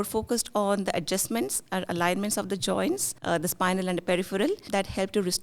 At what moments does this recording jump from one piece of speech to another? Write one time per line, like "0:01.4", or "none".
0:03.1
0:04.6